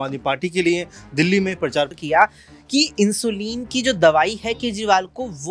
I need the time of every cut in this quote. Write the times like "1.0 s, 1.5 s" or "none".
2.0 s